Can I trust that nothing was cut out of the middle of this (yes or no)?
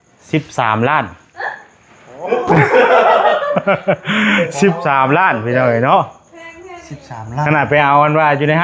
yes